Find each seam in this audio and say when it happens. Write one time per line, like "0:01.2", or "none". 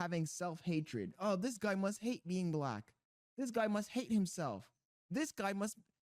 none